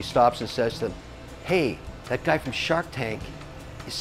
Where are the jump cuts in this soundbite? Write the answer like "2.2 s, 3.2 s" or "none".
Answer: 1.9 s